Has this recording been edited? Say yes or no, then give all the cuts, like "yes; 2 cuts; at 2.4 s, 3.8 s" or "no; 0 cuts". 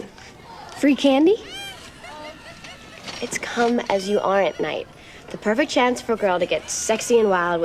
no; 0 cuts